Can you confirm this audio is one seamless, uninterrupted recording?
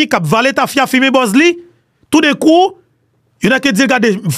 yes; 0 cuts

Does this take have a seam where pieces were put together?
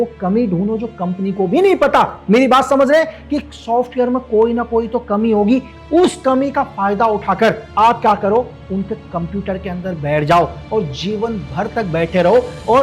no; 0 cuts

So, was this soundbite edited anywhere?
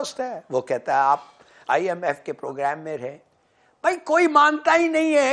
no; 0 cuts

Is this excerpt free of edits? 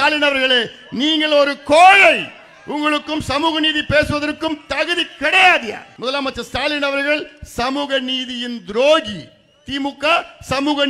no; 1 cut; at 5.9 s

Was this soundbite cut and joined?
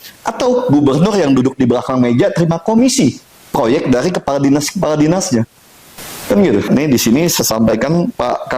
yes; 1 cut; at 6.7 s

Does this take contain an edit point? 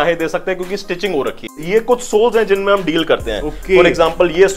yes; 1 cut; at 1.6 s

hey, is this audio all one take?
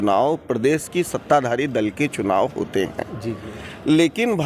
yes; 0 cuts

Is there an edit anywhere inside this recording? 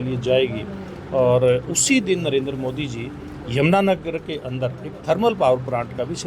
no; 0 cuts

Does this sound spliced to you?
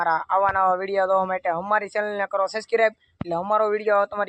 no; 0 cuts

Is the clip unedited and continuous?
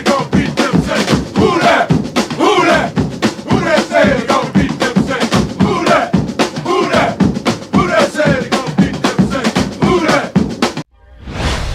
no; 1 cut; at 10.8 s

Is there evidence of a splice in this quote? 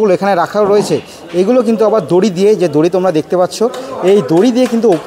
no; 0 cuts

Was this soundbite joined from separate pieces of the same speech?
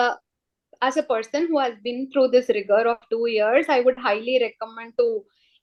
no; 0 cuts

